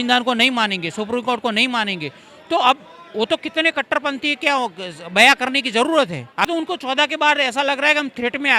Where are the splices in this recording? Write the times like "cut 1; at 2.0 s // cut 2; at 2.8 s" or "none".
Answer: cut 1; at 6.5 s